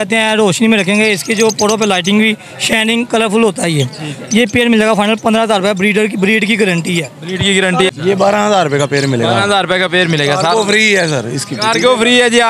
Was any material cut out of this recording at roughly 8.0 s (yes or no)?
yes